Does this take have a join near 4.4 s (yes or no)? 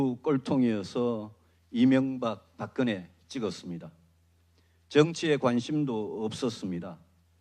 yes